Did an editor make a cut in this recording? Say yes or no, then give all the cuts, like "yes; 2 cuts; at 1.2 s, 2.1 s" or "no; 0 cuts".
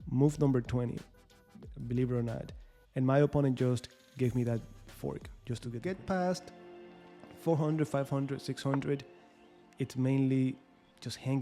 yes; 1 cut; at 5.8 s